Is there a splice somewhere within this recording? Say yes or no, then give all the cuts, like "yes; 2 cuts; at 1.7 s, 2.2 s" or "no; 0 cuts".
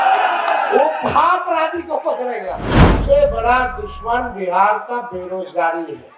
yes; 1 cut; at 3.0 s